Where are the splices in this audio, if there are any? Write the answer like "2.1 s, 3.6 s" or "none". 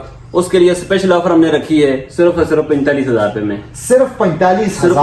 none